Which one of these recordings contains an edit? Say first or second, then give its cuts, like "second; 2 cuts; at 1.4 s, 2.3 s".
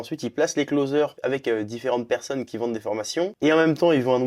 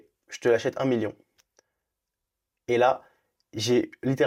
first; 2 cuts; at 1.1 s, 3.3 s